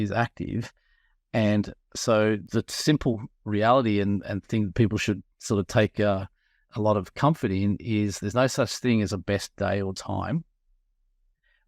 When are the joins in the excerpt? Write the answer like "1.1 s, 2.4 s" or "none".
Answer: 2.4 s, 6.6 s